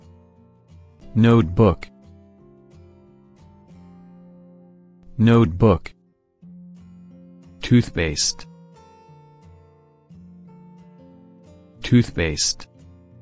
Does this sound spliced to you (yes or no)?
yes